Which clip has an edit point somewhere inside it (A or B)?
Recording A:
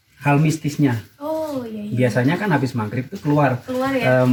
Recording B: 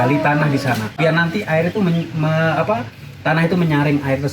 B